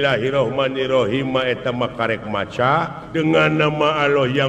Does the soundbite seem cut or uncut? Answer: cut